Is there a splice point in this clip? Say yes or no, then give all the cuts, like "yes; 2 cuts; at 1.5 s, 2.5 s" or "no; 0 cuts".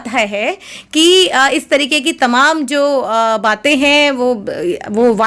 no; 0 cuts